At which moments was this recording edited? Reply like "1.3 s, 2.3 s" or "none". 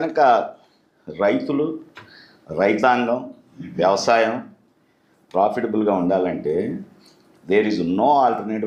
none